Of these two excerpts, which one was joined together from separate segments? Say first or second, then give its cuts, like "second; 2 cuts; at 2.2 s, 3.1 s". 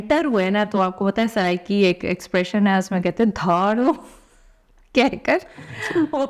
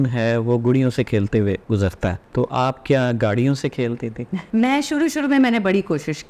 second; 2 cuts; at 1.7 s, 4.4 s